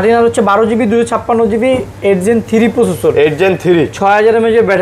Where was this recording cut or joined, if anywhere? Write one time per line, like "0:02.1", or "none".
none